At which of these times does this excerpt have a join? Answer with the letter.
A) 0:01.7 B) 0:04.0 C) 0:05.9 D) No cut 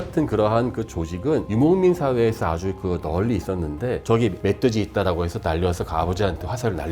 B